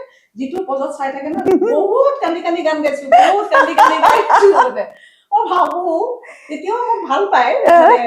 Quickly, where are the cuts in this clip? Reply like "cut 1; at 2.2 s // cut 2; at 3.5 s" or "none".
none